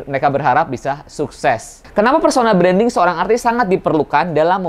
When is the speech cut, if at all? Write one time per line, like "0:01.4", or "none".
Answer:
0:01.8